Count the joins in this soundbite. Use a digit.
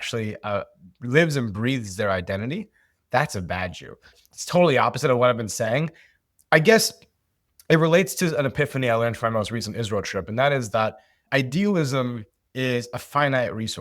2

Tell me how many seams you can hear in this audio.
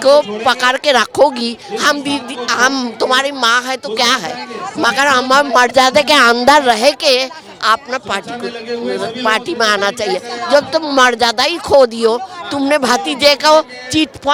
0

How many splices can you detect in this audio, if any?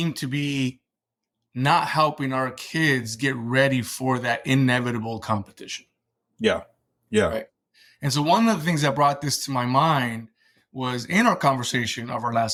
0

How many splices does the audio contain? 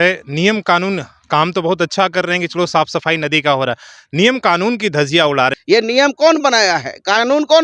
1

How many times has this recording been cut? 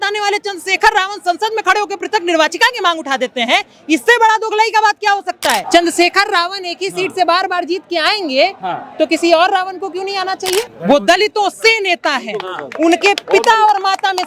2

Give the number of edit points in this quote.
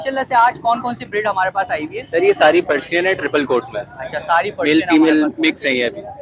0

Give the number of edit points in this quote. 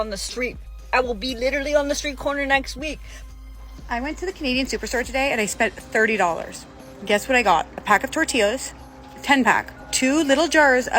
3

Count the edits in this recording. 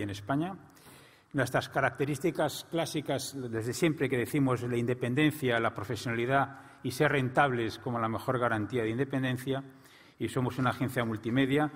1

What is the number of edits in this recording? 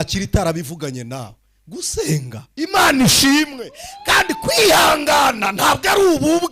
1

